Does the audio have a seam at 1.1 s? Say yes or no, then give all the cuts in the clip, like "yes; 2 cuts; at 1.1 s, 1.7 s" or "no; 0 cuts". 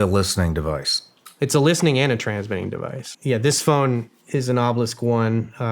no; 1 cut; at 3.1 s